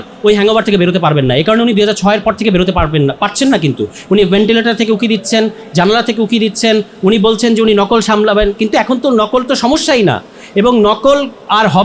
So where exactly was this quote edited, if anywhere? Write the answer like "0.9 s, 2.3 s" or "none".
none

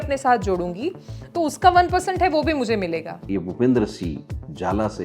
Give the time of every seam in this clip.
3.1 s

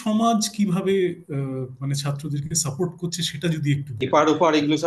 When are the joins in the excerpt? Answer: 4.0 s

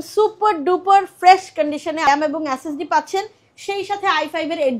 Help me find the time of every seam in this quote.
2.1 s

